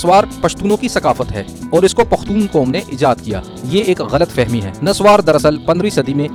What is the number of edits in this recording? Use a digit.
0